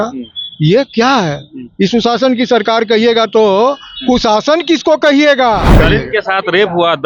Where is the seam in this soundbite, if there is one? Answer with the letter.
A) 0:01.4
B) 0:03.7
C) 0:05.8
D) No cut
C